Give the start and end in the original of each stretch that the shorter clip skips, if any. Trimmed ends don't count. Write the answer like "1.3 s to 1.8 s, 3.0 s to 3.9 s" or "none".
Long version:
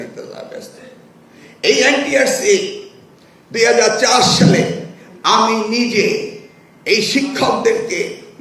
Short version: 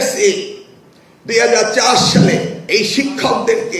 4.8 s to 6.7 s

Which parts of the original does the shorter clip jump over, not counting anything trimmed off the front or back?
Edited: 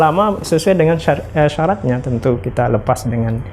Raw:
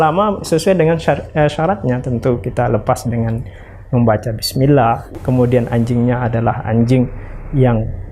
none

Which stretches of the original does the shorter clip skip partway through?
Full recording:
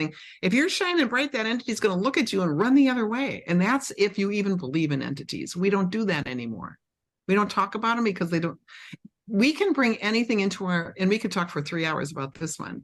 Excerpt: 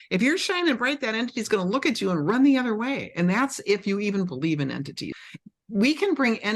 5.4 s to 8.7 s

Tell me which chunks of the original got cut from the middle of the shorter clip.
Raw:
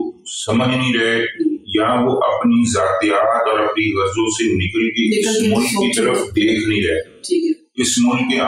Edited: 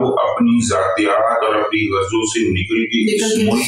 none

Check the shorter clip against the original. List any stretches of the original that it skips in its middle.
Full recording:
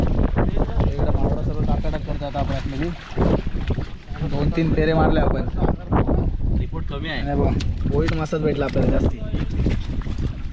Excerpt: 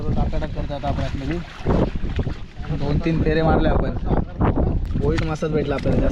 6.4 s to 7.7 s

